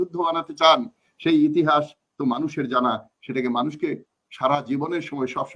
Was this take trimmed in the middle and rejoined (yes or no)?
no